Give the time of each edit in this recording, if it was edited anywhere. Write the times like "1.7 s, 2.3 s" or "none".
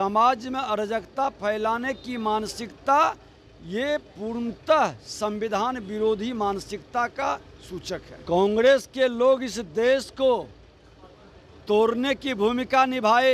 8.1 s